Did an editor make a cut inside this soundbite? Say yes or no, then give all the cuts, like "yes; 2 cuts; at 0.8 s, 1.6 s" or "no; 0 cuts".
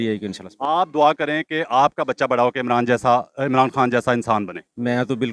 no; 0 cuts